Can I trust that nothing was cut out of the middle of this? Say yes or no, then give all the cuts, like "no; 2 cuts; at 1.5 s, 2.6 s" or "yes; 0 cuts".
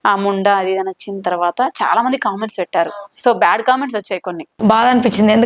no; 1 cut; at 4.5 s